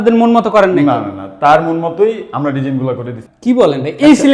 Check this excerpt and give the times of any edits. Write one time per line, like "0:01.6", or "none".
0:03.1